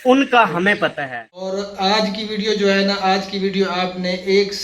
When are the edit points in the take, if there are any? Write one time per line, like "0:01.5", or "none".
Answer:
0:00.9